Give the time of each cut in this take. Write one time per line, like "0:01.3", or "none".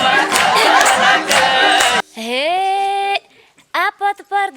0:02.0